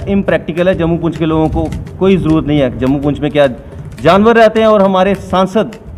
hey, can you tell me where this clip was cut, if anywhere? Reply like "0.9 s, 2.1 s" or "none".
none